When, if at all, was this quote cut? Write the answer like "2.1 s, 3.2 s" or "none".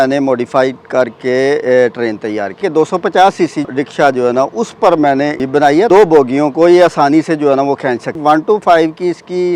2.6 s, 3.7 s, 5.8 s, 8.2 s